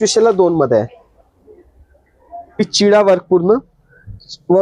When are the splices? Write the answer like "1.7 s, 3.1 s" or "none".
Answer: 2.6 s